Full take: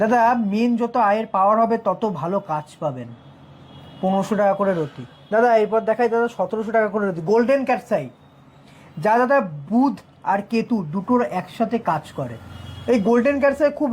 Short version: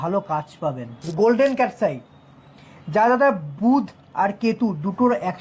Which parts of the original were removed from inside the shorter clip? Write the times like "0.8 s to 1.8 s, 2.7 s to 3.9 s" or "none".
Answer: 3.3 s to 7.2 s